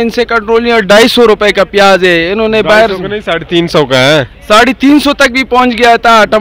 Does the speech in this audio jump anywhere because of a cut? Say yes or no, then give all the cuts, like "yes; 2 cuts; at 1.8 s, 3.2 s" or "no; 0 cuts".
no; 0 cuts